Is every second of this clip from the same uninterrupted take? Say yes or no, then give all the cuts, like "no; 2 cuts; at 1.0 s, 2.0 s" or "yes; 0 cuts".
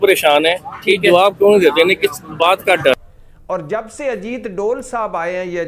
no; 1 cut; at 3.0 s